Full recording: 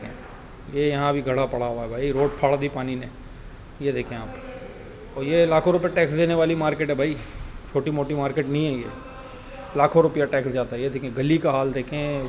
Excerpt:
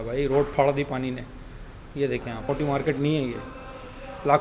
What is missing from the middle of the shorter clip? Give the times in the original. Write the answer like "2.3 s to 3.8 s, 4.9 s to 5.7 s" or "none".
4.3 s to 8.0 s